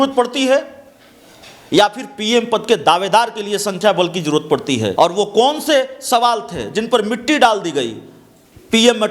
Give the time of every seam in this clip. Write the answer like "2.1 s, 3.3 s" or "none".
4.9 s